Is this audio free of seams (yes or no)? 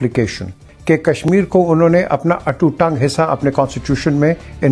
no